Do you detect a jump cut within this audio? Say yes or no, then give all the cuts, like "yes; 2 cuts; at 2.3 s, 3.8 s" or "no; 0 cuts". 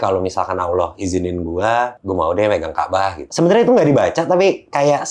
yes; 2 cuts; at 1.9 s, 3.3 s